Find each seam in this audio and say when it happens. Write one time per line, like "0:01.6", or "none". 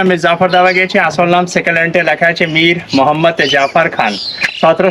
none